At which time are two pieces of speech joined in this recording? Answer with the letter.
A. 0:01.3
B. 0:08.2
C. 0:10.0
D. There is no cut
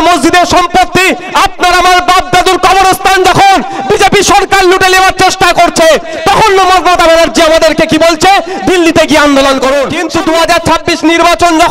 C